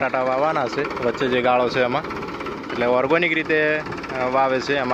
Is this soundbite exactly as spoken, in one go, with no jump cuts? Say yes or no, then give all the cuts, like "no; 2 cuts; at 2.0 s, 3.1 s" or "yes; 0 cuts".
yes; 0 cuts